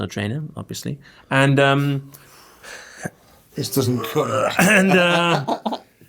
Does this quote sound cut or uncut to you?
uncut